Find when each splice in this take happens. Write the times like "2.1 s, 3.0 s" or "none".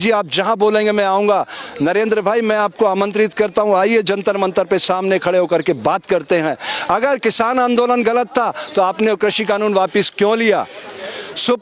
none